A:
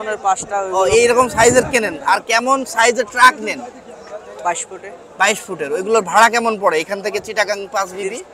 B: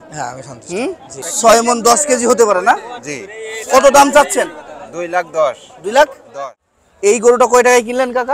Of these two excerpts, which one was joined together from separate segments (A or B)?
B